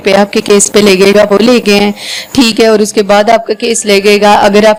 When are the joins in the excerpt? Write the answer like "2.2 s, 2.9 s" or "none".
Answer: none